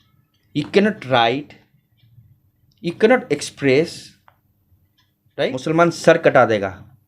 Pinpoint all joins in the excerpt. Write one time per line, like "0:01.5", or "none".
0:05.6